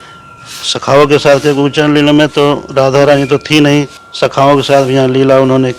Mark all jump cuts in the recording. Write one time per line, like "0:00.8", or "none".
0:04.0